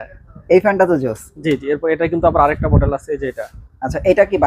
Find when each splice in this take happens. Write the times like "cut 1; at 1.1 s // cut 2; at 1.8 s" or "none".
none